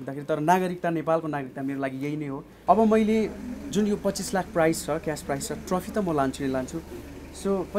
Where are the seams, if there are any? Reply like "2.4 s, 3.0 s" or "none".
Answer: 2.5 s